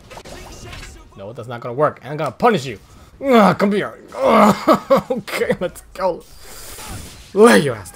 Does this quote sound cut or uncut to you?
uncut